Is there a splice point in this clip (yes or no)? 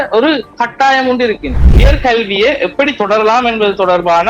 yes